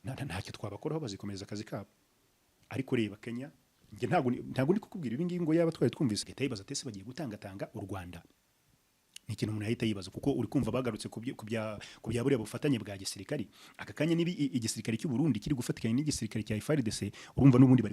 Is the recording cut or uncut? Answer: cut